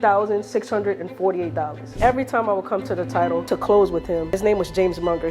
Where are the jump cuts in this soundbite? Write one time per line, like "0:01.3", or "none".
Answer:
0:02.0
0:03.4
0:04.4